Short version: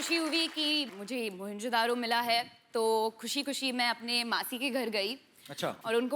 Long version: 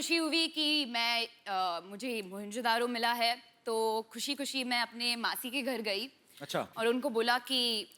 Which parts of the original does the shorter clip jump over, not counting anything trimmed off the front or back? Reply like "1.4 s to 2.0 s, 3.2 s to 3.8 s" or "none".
0.9 s to 1.8 s